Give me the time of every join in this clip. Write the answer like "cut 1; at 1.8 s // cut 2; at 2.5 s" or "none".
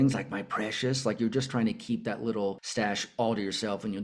cut 1; at 2.6 s